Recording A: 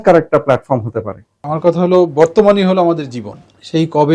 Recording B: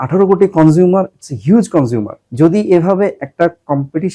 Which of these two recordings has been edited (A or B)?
A